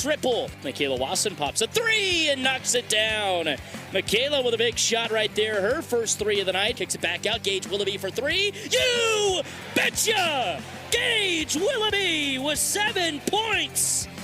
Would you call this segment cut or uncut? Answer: cut